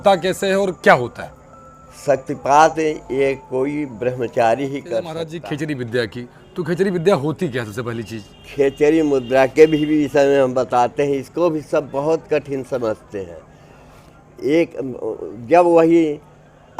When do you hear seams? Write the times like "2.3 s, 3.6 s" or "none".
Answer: 5.3 s

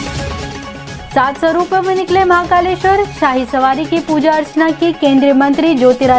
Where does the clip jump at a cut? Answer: 1.0 s

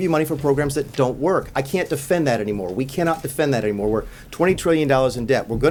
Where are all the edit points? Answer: none

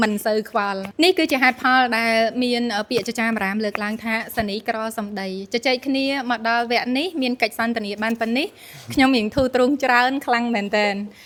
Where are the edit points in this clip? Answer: none

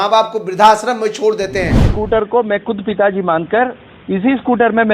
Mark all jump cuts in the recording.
1.9 s

